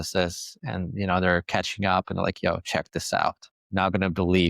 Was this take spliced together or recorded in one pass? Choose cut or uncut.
cut